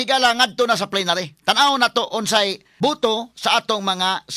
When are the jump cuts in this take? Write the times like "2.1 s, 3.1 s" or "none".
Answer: 2.6 s